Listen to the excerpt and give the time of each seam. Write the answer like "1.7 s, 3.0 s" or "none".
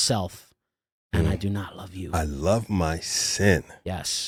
none

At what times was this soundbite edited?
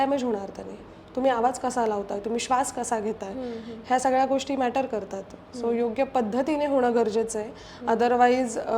none

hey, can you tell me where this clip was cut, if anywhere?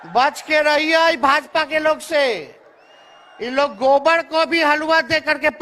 none

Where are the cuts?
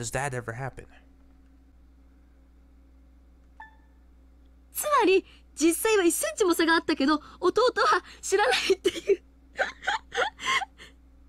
1.7 s

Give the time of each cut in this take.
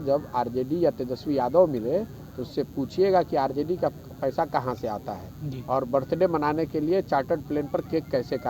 none

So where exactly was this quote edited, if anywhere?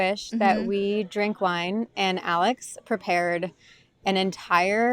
none

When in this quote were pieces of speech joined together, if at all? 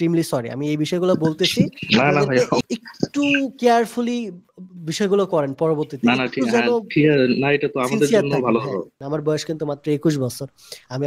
2.6 s, 8.9 s

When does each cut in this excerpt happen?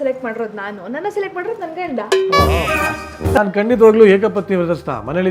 3.4 s

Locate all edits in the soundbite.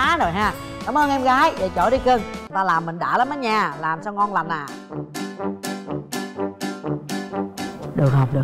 2.4 s

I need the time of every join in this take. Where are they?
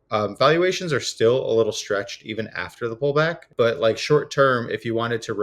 3.5 s

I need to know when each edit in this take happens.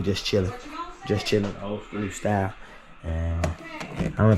none

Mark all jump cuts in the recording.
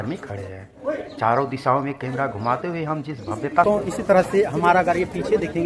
3.6 s

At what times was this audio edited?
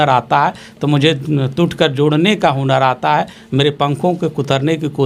none

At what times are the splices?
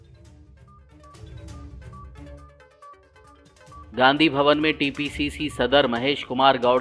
3.3 s

